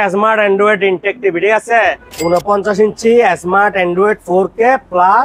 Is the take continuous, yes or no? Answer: no